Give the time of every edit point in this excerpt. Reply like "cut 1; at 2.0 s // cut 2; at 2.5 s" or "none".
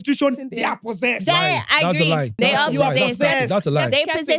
cut 1; at 2.4 s